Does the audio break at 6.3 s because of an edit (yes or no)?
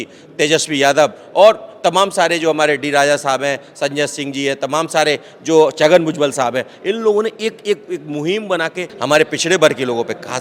no